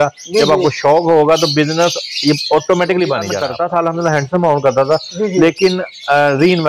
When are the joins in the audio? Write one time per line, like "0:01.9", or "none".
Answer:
0:03.4

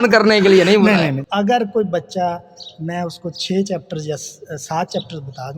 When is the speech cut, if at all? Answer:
0:01.2

